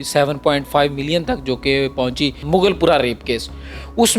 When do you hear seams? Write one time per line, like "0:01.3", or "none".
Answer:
0:02.4